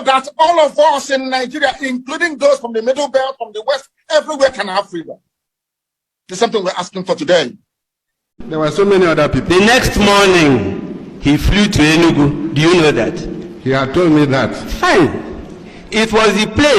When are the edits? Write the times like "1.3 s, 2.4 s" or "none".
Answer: 8.4 s